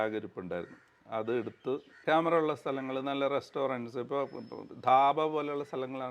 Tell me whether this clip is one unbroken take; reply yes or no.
no